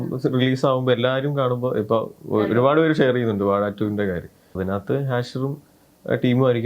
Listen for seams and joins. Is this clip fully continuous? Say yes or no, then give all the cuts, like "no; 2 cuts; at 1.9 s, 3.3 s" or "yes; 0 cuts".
no; 1 cut; at 4.5 s